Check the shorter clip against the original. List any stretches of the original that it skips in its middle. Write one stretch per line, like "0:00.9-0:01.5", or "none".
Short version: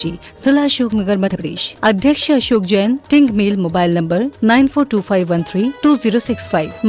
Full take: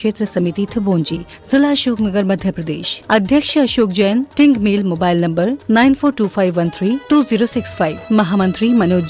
0:02.5-0:02.7